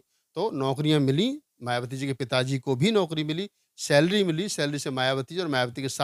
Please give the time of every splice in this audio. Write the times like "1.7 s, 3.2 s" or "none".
none